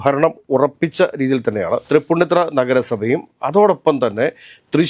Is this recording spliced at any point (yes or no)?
yes